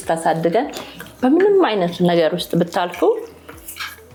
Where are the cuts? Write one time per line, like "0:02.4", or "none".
none